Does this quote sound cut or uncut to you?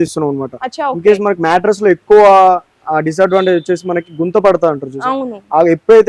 uncut